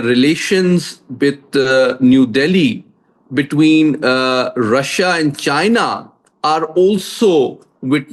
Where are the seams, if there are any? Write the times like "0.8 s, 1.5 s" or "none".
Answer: none